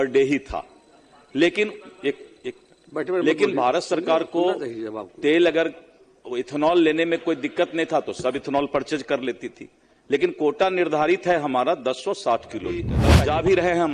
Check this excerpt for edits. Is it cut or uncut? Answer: cut